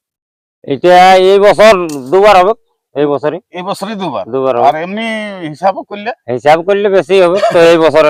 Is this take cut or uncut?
uncut